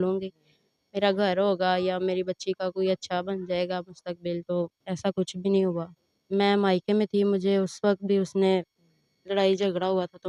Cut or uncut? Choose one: cut